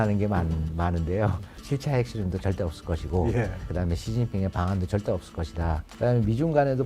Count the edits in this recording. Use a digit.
3